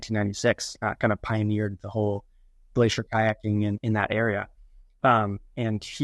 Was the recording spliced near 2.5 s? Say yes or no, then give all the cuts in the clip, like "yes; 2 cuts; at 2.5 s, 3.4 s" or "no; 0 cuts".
no; 1 cut; at 3.8 s